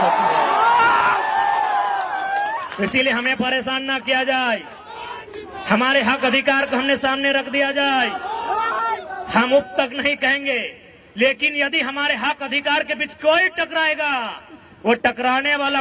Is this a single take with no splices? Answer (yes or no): yes